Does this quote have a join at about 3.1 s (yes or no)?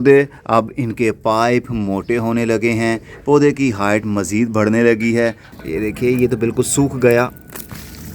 no